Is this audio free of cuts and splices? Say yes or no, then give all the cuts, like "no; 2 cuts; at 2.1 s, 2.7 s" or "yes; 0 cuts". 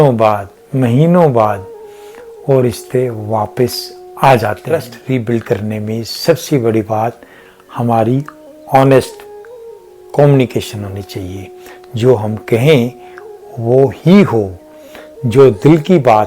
no; 1 cut; at 4.9 s